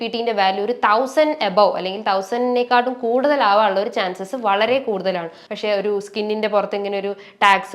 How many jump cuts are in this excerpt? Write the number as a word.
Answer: one